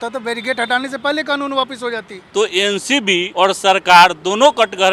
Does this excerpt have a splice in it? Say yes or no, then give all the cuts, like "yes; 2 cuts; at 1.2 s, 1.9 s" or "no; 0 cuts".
yes; 2 cuts; at 2.1 s, 3.3 s